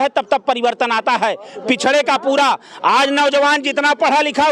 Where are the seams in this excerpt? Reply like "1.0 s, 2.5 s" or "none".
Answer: none